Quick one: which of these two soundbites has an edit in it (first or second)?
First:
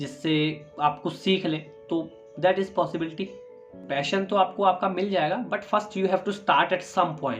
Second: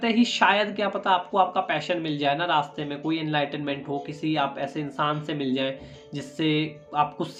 first